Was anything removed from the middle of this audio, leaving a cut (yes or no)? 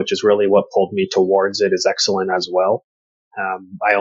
no